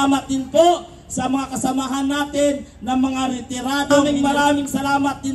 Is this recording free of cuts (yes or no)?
no